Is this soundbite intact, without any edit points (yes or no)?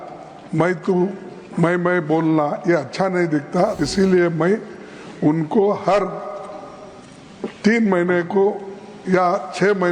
no